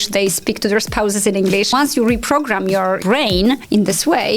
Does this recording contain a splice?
yes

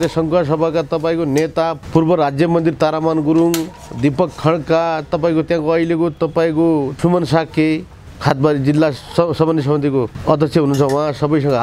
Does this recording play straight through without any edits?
no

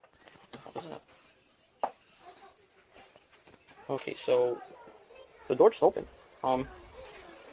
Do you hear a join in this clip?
no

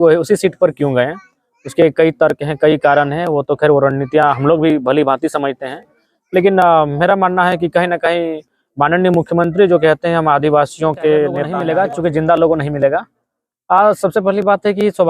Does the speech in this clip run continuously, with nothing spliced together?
no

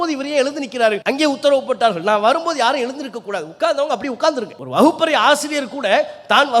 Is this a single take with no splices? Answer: no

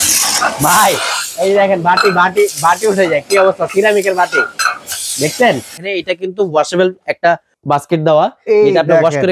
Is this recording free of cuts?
no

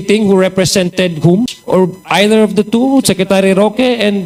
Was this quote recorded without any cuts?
no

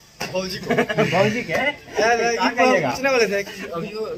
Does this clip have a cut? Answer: no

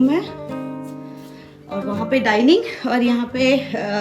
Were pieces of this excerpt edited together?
no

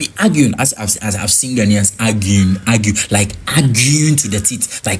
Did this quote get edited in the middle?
no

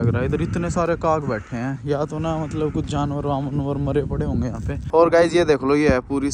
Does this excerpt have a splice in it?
yes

